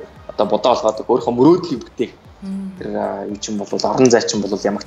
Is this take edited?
no; 0 cuts

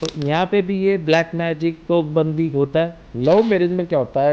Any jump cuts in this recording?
yes; 1 cut; at 3.0 s

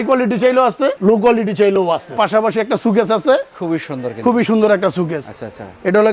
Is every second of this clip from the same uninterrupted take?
no; 2 cuts; at 1.0 s, 2.1 s

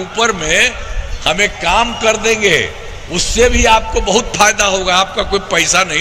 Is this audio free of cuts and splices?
yes; 0 cuts

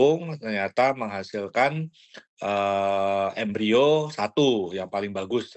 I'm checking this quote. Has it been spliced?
no; 0 cuts

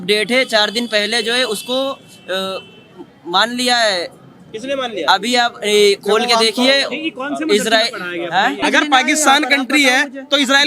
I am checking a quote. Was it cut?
yes; 1 cut; at 8.6 s

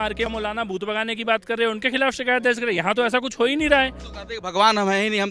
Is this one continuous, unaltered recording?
no; 1 cut; at 4.1 s

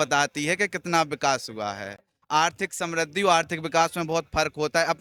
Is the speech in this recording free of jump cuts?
yes; 0 cuts

